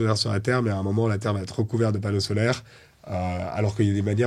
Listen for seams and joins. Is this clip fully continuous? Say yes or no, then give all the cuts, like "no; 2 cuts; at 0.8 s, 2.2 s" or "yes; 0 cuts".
yes; 0 cuts